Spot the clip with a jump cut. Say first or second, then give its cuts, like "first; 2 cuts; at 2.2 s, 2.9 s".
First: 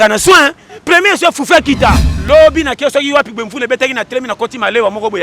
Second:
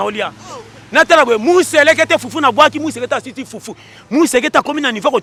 first; 1 cut; at 2.1 s